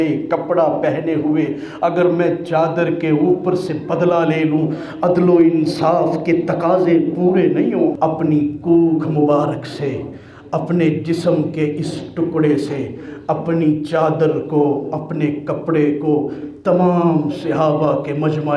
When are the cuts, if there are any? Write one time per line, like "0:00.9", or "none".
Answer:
0:07.9